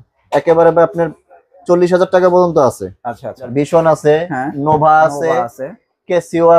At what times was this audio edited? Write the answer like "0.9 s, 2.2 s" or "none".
3.5 s